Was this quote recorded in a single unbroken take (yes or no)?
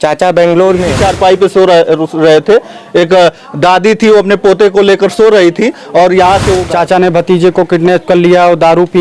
no